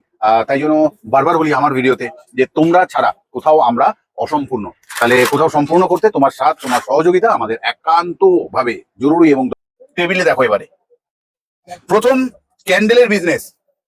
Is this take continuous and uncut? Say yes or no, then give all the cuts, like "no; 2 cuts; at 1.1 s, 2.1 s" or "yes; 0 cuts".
no; 1 cut; at 9.5 s